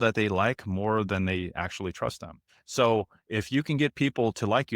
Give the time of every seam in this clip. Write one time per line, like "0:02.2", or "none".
0:02.5